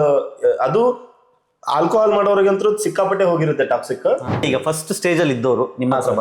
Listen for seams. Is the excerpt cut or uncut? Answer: cut